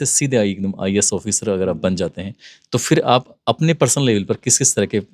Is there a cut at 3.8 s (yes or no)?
no